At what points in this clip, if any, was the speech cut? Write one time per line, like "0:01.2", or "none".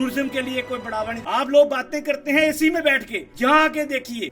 0:01.2